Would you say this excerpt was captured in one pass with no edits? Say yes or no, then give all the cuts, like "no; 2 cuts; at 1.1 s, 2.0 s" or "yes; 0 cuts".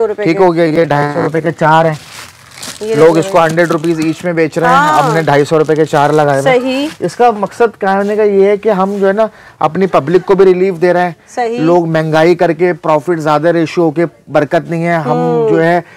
yes; 0 cuts